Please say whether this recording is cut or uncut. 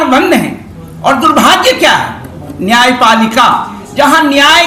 uncut